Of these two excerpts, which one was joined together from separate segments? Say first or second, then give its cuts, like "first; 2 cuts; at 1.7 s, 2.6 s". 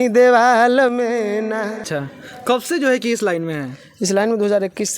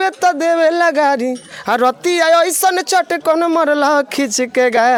first; 1 cut; at 1.8 s